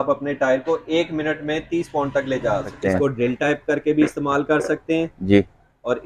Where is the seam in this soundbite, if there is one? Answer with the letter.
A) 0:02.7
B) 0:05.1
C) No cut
A